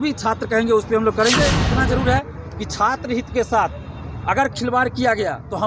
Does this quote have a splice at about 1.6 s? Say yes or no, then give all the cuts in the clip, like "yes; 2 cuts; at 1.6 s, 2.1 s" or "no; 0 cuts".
yes; 1 cut; at 1.6 s